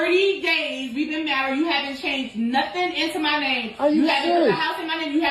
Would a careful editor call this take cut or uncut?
uncut